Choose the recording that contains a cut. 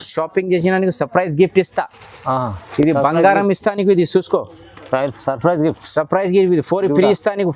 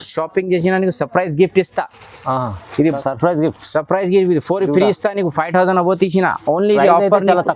second; 1 cut; at 2.8 s

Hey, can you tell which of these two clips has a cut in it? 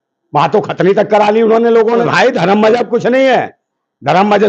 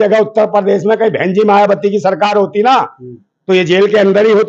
first; 1 cut; at 2.0 s

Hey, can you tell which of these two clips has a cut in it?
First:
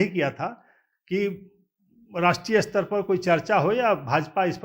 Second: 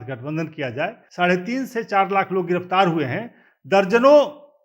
second; 1 cut; at 1.0 s

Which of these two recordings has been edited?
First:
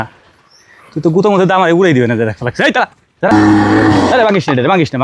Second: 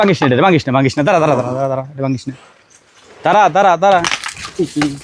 first; 1 cut; at 3.3 s

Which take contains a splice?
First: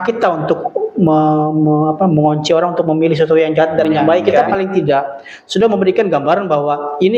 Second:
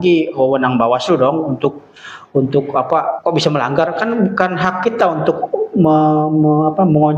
first; 1 cut; at 4.4 s

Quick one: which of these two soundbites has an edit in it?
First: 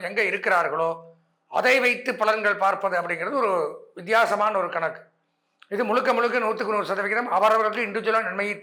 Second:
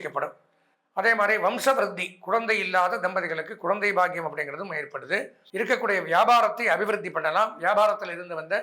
second; 1 cut; at 5.4 s

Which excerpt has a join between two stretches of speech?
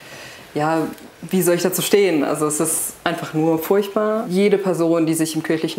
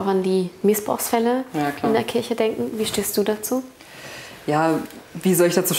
first; 1 cut; at 4.3 s

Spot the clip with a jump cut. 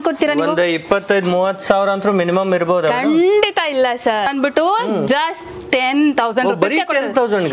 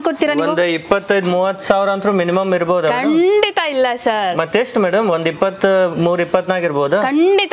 first; 1 cut; at 4.3 s

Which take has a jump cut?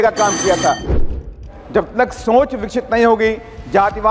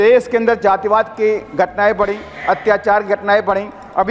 first; 1 cut; at 1.1 s

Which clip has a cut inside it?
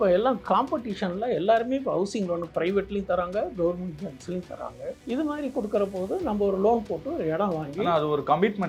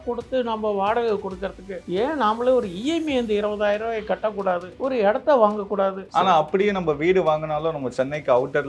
second; 1 cut; at 6.0 s

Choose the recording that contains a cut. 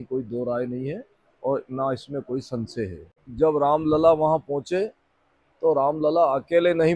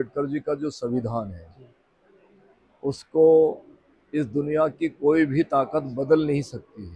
first; 1 cut; at 3.2 s

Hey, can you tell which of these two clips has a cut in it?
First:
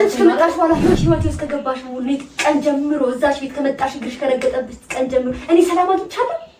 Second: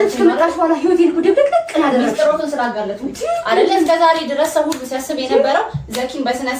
first; 1 cut; at 1.0 s

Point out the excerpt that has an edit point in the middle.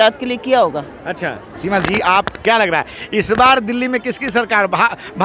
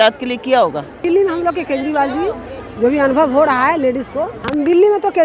second; 2 cuts; at 1.0 s, 4.4 s

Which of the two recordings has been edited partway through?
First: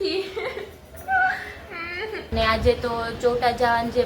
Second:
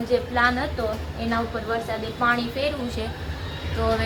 first; 1 cut; at 2.3 s

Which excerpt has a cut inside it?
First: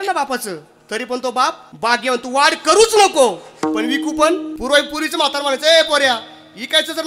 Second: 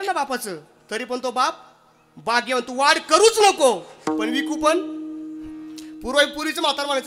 first; 2 cuts; at 1.7 s, 4.5 s

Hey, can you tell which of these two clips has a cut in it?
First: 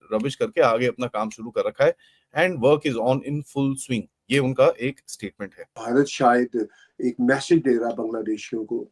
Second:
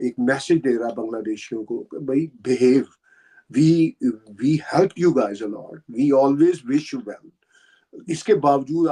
first; 1 cut; at 5.8 s

